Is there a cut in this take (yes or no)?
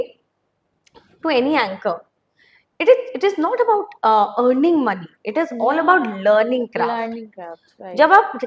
no